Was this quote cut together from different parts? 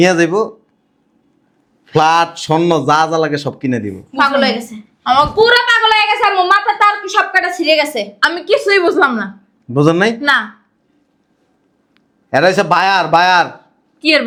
no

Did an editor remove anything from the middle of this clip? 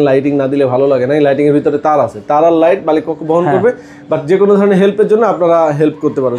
no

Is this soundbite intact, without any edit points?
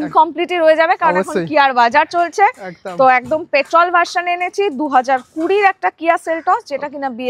yes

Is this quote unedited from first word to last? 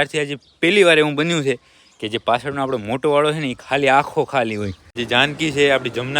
no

